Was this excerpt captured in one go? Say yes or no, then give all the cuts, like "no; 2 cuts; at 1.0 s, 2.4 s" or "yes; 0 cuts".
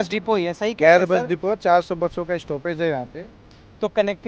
yes; 0 cuts